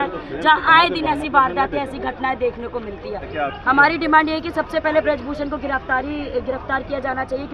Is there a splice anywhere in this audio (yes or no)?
yes